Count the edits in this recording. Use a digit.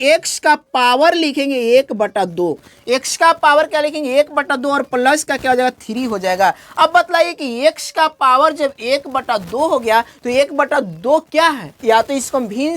1